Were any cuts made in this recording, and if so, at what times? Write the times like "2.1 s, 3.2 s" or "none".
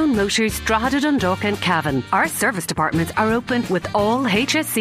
none